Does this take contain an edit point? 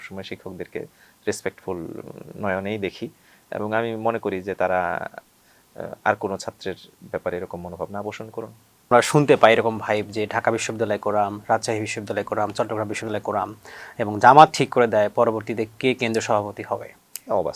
yes; 1 cut; at 8.9 s

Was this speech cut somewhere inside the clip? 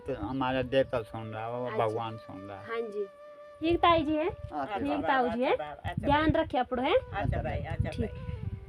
yes; 1 cut; at 3.2 s

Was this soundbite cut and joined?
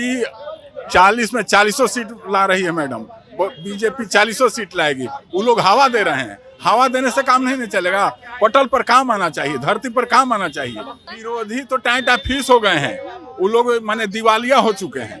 yes; 1 cut; at 11.0 s

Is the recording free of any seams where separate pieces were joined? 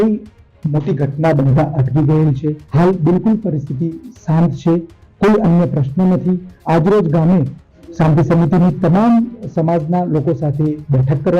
no; 2 cuts; at 2.6 s, 6.5 s

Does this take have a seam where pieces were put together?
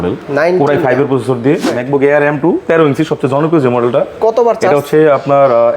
yes; 1 cut; at 1.8 s

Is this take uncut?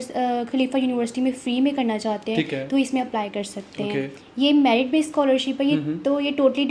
yes; 0 cuts

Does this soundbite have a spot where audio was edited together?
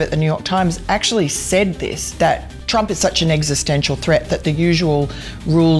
no; 0 cuts

